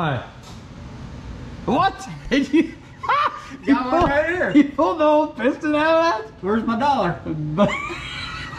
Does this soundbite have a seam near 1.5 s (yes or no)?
no